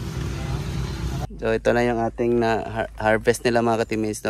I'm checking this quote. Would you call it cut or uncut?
cut